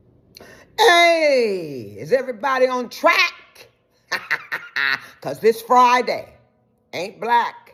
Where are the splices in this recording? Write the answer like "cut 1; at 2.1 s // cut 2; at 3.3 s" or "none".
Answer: none